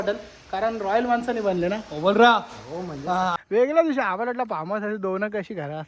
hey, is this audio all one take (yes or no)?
no